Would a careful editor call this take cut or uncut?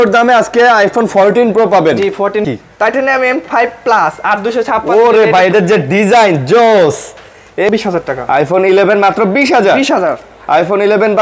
cut